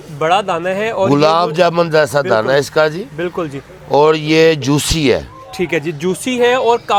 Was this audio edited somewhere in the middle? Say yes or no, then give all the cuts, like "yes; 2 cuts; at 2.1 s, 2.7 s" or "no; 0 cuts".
no; 0 cuts